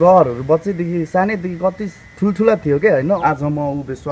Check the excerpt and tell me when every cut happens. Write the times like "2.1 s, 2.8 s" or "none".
3.2 s